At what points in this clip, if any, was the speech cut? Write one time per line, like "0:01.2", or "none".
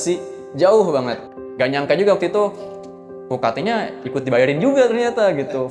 0:01.4